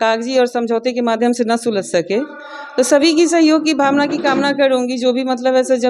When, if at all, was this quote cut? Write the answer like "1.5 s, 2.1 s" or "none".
none